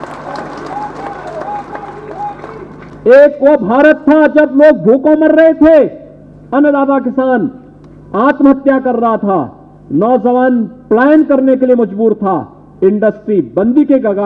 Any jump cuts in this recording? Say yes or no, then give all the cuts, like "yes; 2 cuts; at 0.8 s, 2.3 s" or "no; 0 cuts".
yes; 1 cut; at 2.9 s